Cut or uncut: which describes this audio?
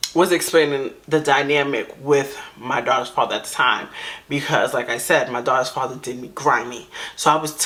uncut